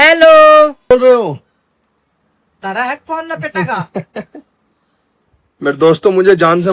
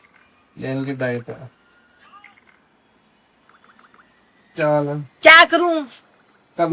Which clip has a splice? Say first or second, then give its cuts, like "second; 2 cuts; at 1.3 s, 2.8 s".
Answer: first; 1 cut; at 0.9 s